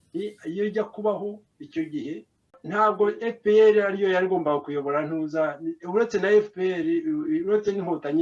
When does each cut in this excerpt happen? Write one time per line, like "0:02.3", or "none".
0:02.6